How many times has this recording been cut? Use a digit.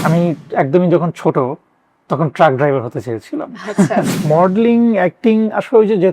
1